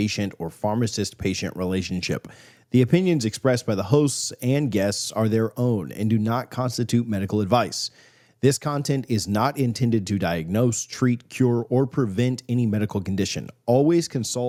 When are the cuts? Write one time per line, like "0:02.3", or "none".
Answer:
none